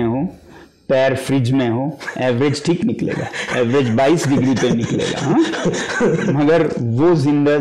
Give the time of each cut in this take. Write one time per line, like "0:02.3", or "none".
none

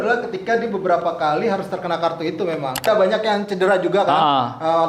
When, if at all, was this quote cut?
0:02.8

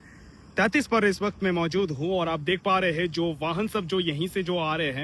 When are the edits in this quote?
none

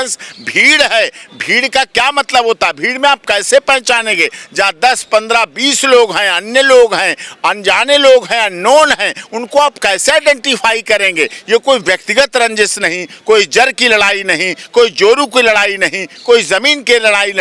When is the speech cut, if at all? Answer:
none

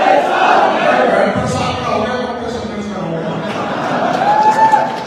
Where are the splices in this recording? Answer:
none

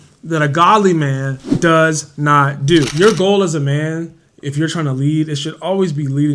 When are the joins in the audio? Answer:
0:02.9

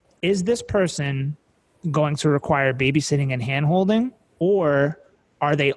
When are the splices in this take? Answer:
0:04.2

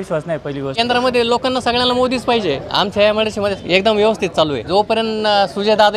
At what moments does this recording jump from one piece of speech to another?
0:00.8
0:02.6
0:03.6
0:04.6

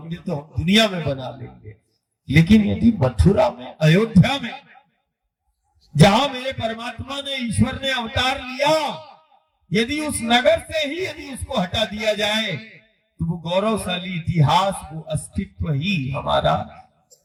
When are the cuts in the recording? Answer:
none

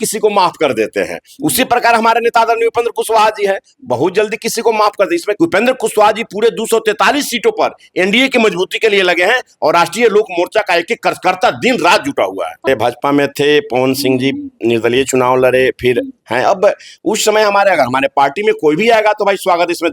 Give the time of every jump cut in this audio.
0:05.3
0:12.7

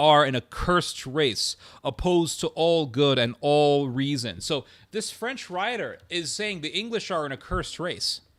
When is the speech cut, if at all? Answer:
none

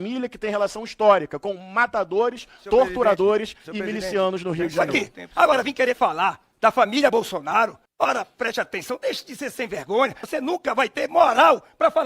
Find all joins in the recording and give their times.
0:04.8
0:10.2

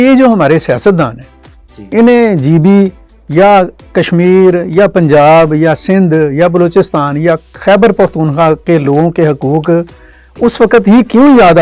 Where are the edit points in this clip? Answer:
none

